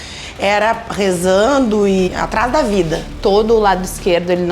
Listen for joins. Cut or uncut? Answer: cut